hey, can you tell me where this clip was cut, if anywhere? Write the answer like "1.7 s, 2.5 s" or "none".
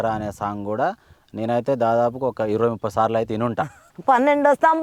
3.8 s

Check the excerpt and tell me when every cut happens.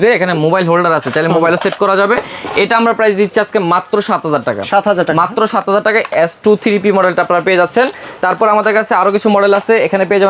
none

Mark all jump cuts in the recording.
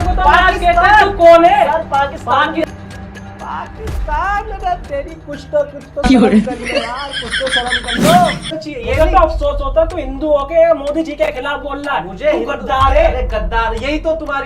8.6 s

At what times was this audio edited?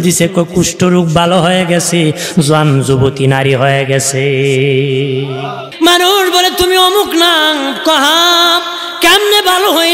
5.6 s

